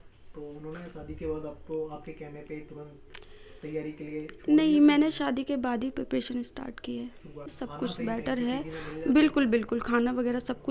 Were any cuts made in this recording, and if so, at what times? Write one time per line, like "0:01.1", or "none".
0:07.6